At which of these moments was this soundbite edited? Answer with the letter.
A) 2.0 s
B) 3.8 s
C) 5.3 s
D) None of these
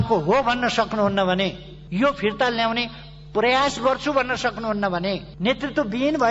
C